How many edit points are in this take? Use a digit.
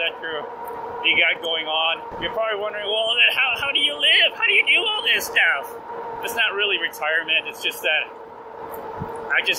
2